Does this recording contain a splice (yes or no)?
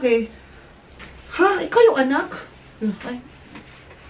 no